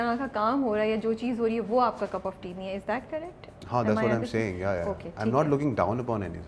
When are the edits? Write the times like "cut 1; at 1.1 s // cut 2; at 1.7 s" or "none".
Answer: none